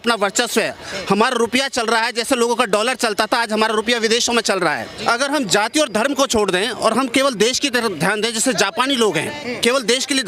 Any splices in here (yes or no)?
yes